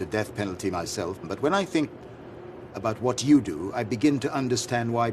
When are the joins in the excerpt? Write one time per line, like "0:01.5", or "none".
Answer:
0:01.2